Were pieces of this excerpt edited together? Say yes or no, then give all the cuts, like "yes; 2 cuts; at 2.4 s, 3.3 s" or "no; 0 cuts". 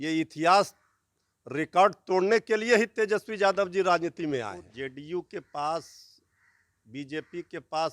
yes; 1 cut; at 4.7 s